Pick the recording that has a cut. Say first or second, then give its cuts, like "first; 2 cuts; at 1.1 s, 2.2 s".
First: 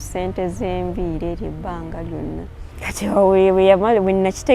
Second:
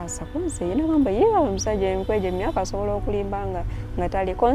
first; 1 cut; at 2.6 s